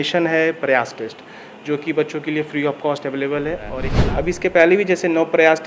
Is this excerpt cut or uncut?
cut